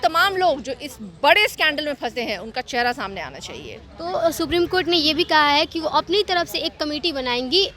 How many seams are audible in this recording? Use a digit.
0